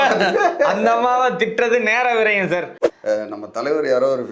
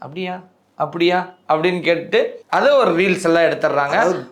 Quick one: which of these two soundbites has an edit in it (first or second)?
first